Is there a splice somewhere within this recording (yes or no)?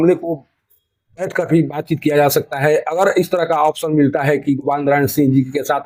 no